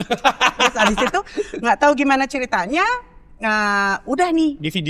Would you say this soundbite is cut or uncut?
uncut